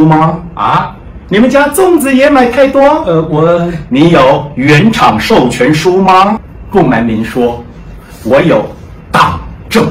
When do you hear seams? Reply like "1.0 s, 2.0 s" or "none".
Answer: 6.4 s